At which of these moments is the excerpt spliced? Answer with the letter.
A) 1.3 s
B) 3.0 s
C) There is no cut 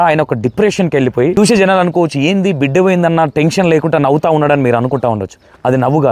A